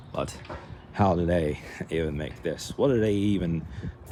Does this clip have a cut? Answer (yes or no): no